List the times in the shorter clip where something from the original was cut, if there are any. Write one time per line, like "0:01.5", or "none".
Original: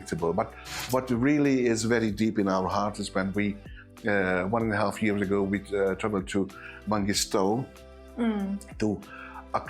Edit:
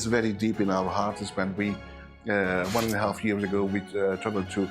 none

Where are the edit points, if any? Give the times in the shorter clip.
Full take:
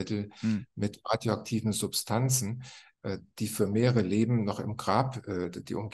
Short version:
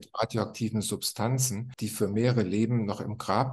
0:01.7

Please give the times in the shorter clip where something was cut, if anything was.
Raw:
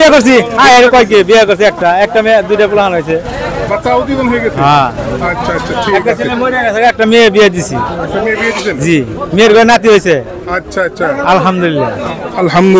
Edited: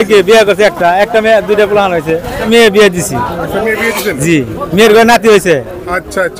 0:02.4

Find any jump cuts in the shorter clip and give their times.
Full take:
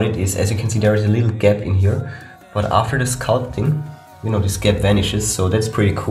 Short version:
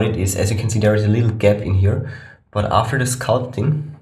none

